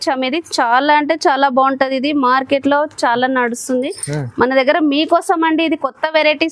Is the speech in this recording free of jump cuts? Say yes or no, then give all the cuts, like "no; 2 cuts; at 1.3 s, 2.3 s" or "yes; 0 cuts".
yes; 0 cuts